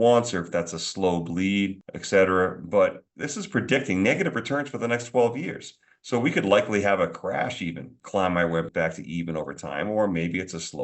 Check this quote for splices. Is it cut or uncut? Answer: cut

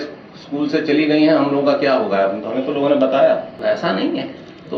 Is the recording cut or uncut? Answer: cut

